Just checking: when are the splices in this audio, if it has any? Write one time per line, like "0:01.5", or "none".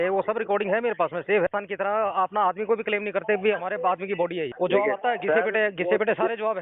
0:01.5
0:04.5